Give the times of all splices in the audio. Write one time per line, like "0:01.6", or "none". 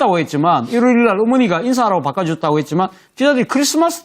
0:02.3

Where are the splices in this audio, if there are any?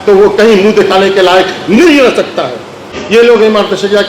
0:03.0

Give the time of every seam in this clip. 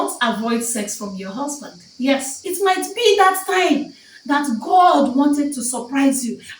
0:02.4

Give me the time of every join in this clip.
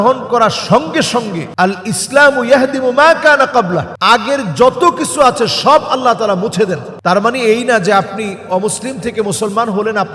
0:01.4
0:03.9
0:06.9

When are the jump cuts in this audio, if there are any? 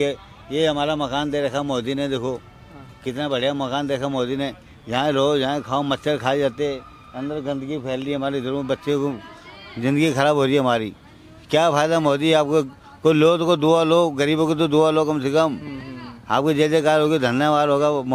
none

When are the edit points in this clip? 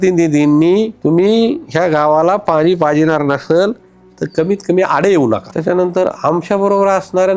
0:00.9
0:05.5

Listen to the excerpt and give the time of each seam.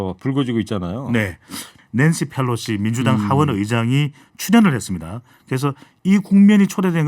0:01.7

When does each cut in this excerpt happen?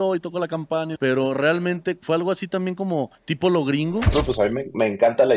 0:00.9
0:02.0
0:03.2
0:04.1

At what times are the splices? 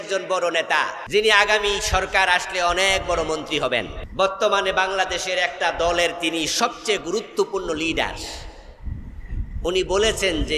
0:01.0
0:04.0

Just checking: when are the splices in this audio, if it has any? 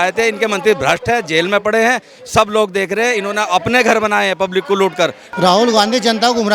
0:05.2

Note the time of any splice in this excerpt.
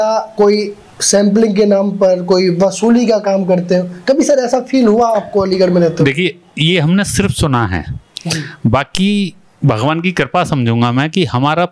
none

